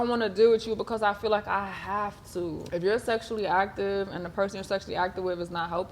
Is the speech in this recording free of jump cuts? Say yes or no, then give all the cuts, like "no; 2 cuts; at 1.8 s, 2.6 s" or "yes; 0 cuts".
no; 1 cut; at 2.6 s